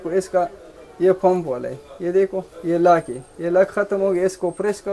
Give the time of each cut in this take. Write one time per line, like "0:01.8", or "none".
none